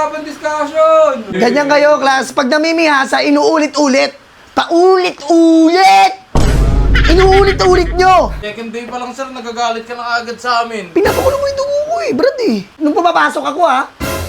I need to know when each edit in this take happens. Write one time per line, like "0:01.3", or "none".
0:01.3
0:08.5
0:12.7